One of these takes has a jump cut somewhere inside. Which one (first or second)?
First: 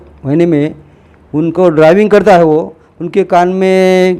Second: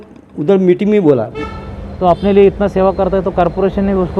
second